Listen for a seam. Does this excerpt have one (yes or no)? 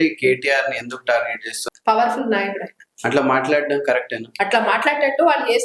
yes